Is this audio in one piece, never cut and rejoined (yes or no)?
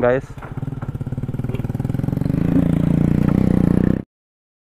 yes